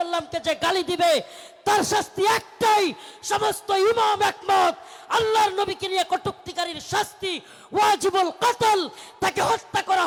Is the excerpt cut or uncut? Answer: uncut